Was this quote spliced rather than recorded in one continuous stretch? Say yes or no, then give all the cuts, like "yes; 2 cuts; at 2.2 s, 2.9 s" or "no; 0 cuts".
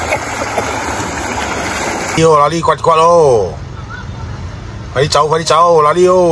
yes; 1 cut; at 2.2 s